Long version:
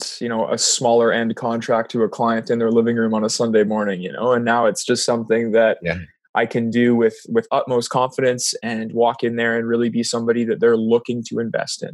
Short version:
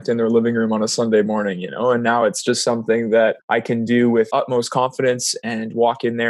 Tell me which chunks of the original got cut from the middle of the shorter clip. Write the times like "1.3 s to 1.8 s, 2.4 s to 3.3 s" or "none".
5.8 s to 6.3 s, 7.1 s to 7.5 s